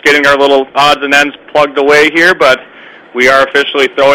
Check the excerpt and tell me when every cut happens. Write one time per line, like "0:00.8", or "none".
none